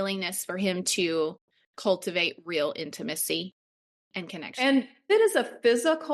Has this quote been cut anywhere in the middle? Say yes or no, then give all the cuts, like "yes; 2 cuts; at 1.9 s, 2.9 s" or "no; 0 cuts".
yes; 1 cut; at 5.1 s